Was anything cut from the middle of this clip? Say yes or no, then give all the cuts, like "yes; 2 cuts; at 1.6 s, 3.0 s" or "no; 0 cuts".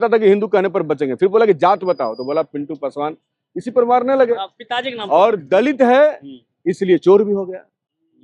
no; 0 cuts